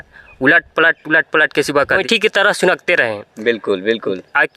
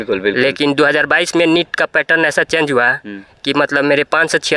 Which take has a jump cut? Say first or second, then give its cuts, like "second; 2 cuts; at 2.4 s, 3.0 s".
first; 1 cut; at 2.0 s